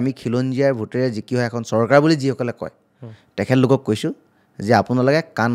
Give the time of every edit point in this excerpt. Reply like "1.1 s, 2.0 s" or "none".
none